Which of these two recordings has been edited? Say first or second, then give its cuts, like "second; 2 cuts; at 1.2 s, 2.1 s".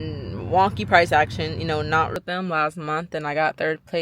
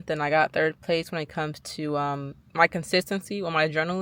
first; 1 cut; at 2.1 s